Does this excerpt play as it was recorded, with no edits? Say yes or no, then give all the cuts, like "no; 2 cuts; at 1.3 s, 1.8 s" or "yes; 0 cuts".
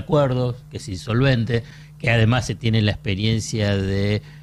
yes; 0 cuts